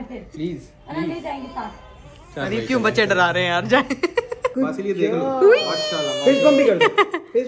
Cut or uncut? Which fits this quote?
cut